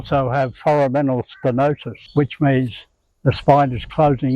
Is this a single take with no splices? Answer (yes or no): no